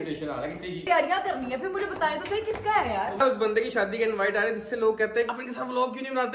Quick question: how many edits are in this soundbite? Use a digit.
3